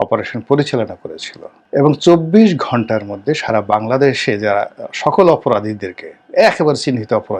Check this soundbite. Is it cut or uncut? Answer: uncut